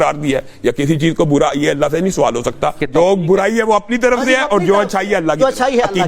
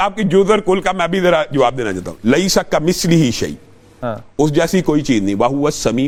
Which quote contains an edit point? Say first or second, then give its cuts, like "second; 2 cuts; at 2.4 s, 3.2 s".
first; 1 cut; at 2.8 s